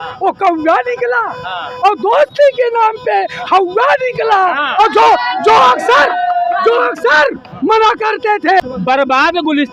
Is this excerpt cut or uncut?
cut